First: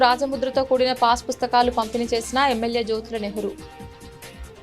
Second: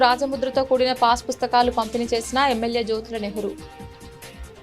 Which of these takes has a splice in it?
second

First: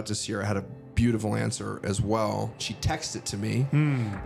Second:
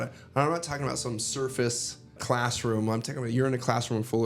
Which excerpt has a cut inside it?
second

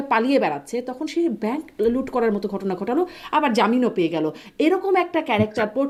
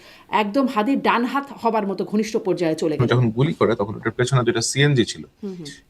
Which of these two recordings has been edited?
second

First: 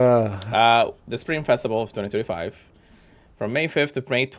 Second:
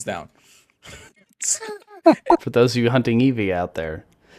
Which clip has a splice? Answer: second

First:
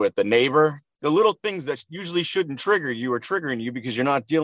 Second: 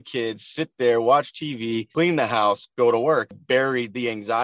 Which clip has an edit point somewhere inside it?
second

